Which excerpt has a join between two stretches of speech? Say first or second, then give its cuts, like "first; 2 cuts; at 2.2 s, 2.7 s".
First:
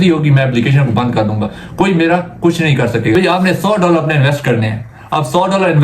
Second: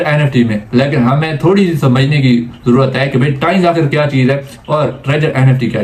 first; 1 cut; at 3.1 s